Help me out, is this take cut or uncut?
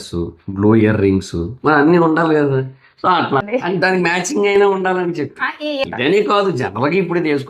cut